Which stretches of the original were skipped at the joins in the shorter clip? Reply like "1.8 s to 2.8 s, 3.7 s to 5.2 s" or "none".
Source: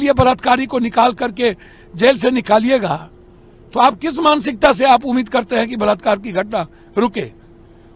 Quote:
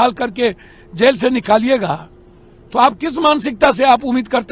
none